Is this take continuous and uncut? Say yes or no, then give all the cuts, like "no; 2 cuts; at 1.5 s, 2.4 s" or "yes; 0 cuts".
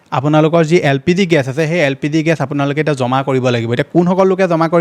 yes; 0 cuts